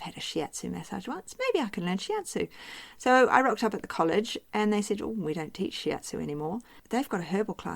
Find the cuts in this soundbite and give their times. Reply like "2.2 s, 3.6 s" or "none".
6.8 s